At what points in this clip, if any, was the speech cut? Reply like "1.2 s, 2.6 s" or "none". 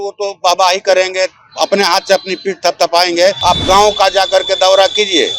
3.4 s

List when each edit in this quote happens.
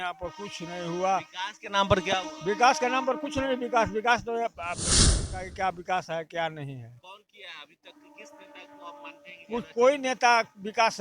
5.2 s

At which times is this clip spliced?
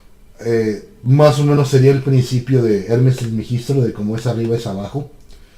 3.6 s

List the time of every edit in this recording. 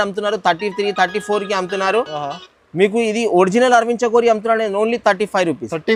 none

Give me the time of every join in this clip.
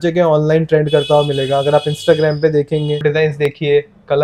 3.0 s

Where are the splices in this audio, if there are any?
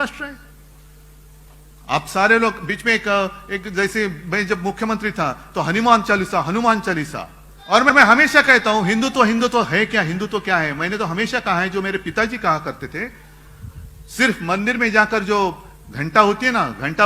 7.9 s

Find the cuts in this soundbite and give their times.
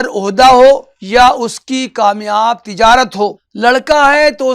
0.9 s, 3.4 s

